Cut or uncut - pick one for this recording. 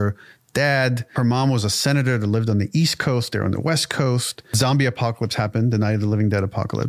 cut